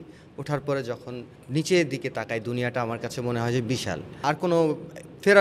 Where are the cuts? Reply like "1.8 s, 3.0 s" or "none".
1.3 s, 4.2 s